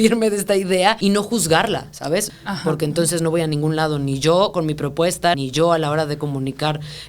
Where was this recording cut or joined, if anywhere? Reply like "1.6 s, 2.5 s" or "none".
1.0 s, 2.3 s, 5.4 s